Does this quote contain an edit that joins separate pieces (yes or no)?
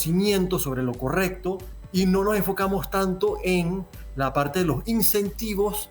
yes